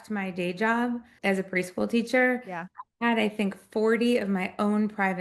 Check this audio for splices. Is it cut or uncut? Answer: uncut